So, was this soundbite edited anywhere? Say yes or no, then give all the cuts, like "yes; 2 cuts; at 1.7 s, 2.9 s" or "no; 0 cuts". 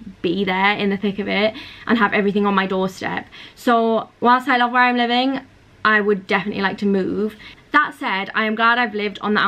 no; 0 cuts